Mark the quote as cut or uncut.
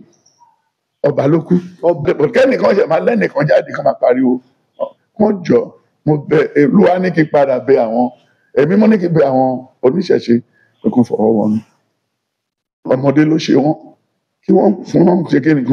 cut